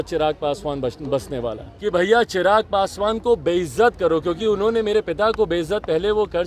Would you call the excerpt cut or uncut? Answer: cut